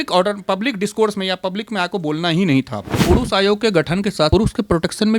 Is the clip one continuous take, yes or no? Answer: no